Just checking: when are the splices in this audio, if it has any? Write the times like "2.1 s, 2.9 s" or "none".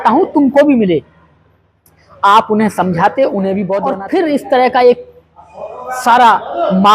3.8 s